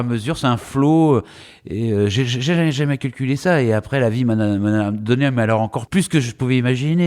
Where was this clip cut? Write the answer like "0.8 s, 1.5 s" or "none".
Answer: 5.8 s